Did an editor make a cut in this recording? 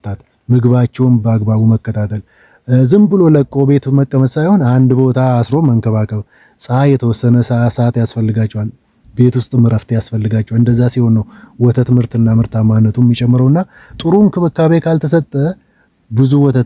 no; 0 cuts

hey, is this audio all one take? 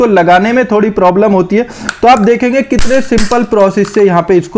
yes; 0 cuts

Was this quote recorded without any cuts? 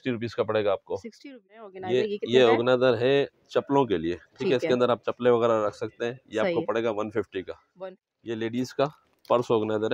no; 2 cuts; at 1.6 s, 7.7 s

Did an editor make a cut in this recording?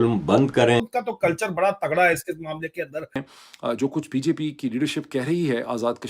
yes; 2 cuts; at 0.9 s, 3.3 s

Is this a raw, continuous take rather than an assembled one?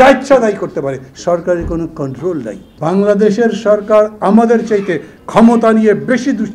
no; 1 cut; at 2.6 s

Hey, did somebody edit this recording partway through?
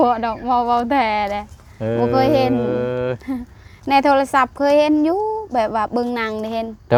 no; 0 cuts

